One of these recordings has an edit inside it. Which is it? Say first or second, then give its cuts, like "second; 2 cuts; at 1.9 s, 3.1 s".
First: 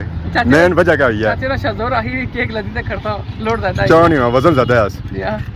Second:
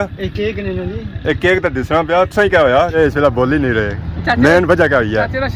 second; 1 cut; at 2.9 s